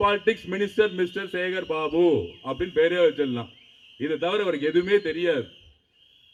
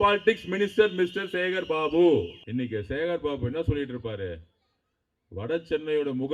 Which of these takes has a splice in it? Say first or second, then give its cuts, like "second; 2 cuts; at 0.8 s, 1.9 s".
second; 1 cut; at 2.4 s